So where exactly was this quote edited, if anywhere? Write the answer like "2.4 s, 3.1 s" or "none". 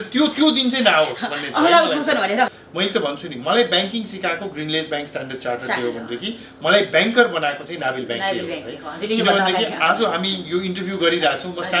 2.5 s